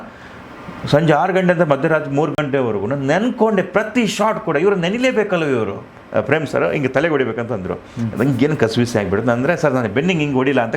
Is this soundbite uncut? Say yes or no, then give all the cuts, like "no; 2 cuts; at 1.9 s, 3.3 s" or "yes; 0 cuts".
no; 1 cut; at 5.9 s